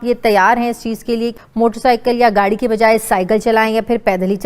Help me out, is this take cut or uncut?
cut